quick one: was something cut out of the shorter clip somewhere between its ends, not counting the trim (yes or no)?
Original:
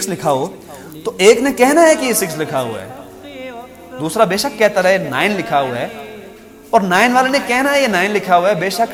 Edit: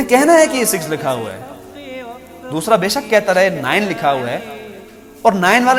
no